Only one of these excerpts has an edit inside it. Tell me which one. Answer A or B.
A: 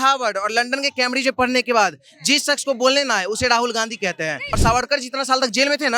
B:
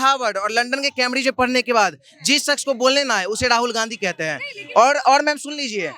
A